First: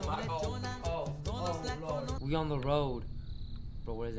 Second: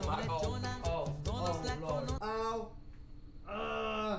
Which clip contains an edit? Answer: first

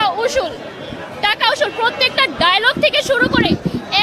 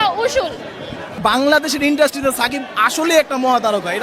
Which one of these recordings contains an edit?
second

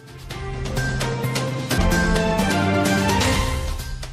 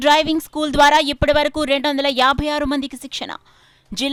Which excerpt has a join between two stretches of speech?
first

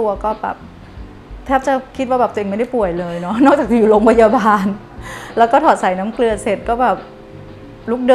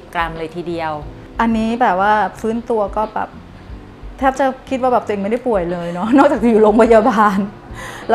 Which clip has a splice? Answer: second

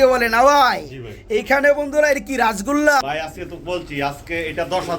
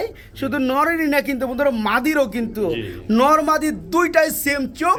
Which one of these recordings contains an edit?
first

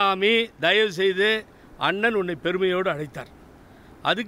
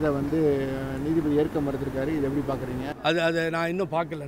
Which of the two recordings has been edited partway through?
second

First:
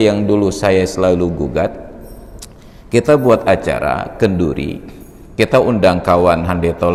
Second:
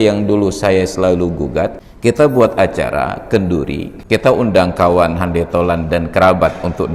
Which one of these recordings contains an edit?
second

